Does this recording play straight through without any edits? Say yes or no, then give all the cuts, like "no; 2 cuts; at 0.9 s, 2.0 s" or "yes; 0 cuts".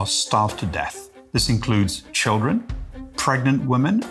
yes; 0 cuts